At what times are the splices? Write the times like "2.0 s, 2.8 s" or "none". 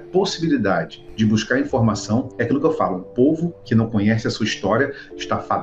1.0 s, 2.3 s, 3.6 s